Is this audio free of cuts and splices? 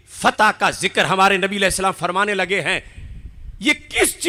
yes; 0 cuts

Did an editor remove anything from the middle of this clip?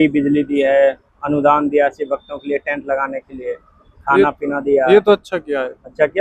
no; 0 cuts

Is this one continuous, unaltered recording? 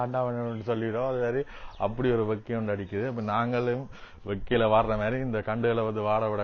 yes; 0 cuts

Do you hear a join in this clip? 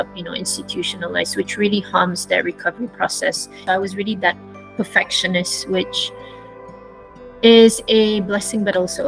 yes; 1 cut; at 3.5 s

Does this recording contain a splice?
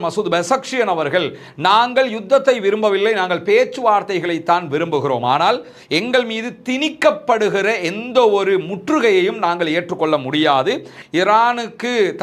yes; 1 cut; at 11.0 s

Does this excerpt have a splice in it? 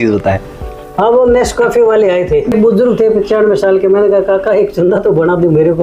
yes; 1 cut; at 2.5 s

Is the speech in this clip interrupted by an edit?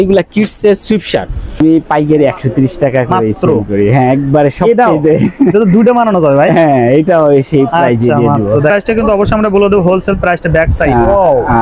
yes; 2 cuts; at 1.6 s, 8.7 s

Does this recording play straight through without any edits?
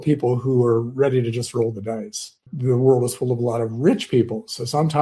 no; 1 cut; at 2.3 s

